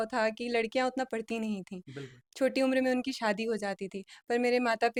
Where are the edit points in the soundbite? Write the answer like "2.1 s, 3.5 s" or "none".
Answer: none